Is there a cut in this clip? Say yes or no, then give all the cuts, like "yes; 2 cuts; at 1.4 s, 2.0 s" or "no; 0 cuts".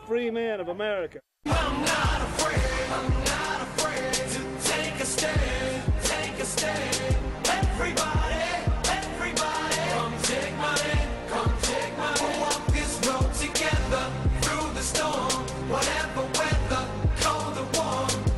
yes; 1 cut; at 3.7 s